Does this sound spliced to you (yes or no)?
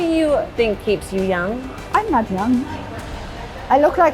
no